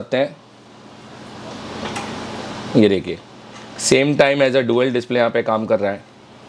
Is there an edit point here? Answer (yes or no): no